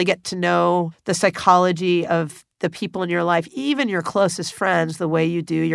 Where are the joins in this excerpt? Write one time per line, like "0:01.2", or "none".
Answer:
0:01.0